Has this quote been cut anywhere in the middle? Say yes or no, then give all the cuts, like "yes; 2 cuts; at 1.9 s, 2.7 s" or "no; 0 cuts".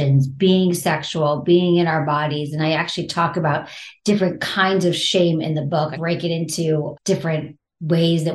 yes; 2 cuts; at 6.0 s, 7.3 s